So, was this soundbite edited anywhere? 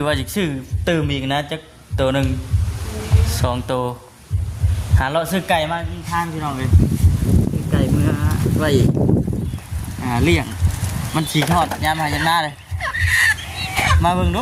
no; 0 cuts

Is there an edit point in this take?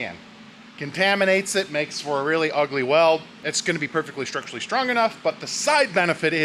no; 0 cuts

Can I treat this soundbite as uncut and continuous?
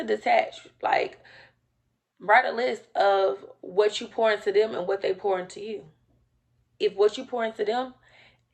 yes; 0 cuts

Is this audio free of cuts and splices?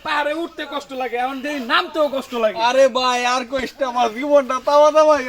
yes; 0 cuts

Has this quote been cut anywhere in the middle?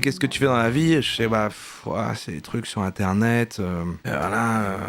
no; 0 cuts

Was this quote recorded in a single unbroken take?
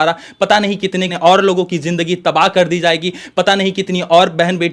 no; 1 cut; at 1.2 s

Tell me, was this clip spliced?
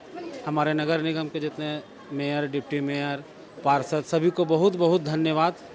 no; 0 cuts

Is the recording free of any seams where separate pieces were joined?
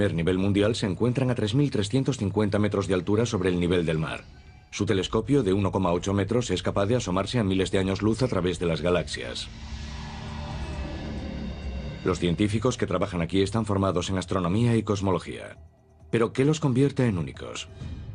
no; 1 cut; at 7.9 s

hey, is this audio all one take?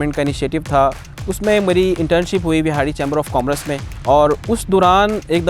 no; 2 cuts; at 1.1 s, 3.9 s

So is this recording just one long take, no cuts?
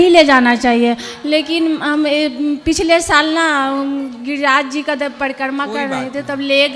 yes; 0 cuts

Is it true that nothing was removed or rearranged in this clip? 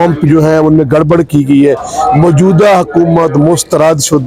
yes; 0 cuts

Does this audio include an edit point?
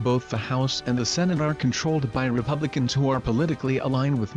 no; 0 cuts

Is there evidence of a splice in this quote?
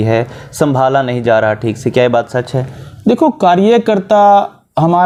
no; 0 cuts

